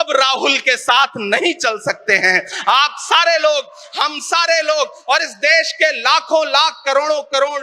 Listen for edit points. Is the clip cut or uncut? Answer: uncut